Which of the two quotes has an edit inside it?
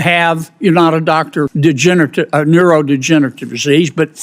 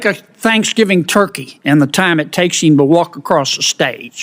first; 1 cut; at 1.5 s

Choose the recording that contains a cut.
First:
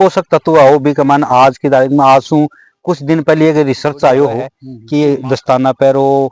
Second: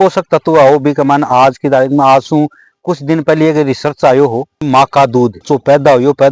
first; 1 cut; at 4.5 s

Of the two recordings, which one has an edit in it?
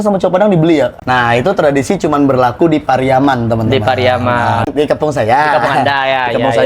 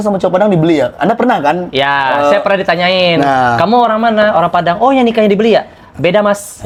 first; 1 cut; at 0.9 s

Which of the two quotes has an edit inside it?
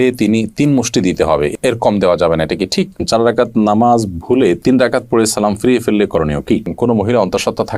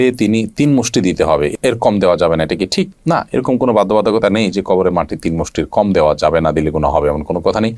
first; 2 cuts; at 3.0 s, 6.7 s

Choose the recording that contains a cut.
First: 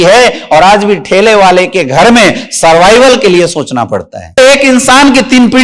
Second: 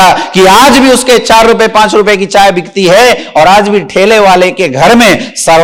first; 1 cut; at 4.4 s

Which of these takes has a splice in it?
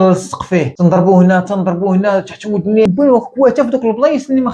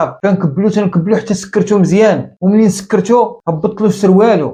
first; 1 cut; at 2.9 s

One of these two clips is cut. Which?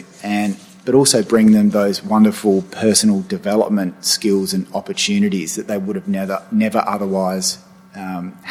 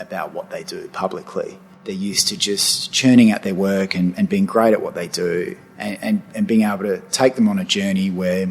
second; 1 cut; at 1.9 s

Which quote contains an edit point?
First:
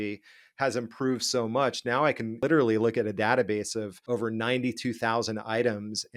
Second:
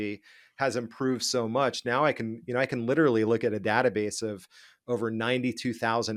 first; 2 cuts; at 2.4 s, 4.0 s

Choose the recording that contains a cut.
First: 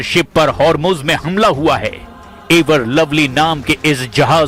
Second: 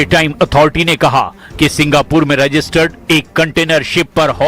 second; 1 cut; at 2.3 s

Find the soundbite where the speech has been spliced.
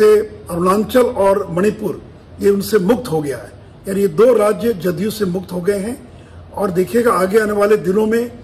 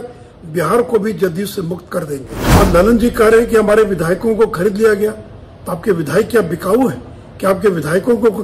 second; 1 cut; at 2.4 s

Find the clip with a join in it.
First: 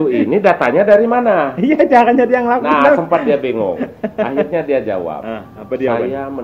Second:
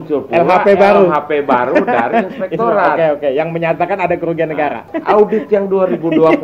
second; 1 cut; at 4.9 s

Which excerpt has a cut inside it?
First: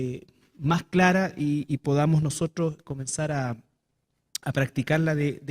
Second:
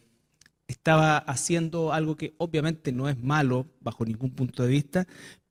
first; 1 cut; at 3.2 s

